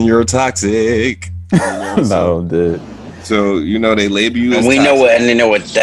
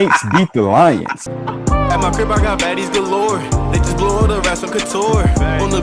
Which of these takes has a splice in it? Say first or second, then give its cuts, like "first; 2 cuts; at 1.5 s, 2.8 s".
second; 1 cut; at 1.3 s